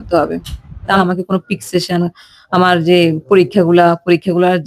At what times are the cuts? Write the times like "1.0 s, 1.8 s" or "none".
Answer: 1.0 s

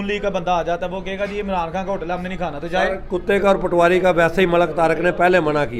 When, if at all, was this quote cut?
none

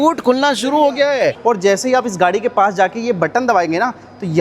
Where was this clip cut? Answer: 1.4 s

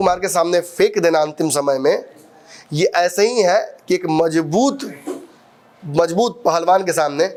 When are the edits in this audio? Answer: none

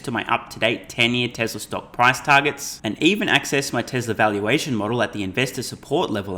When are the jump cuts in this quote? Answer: none

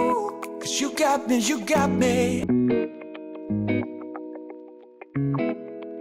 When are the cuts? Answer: 5.1 s

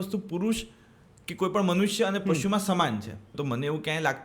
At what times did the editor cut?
3.3 s

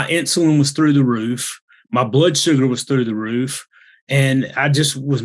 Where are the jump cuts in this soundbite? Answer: none

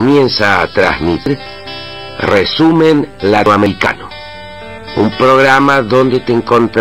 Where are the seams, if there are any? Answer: 1.2 s, 3.6 s

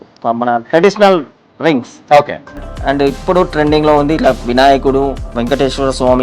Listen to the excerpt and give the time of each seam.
5.2 s

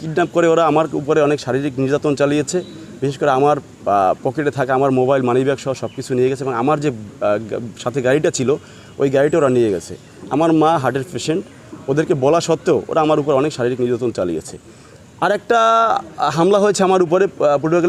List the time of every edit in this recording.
none

